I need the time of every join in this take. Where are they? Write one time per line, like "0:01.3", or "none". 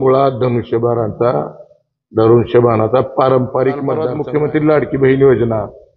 0:04.1